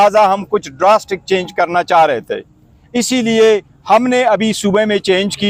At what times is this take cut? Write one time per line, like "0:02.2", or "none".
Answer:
none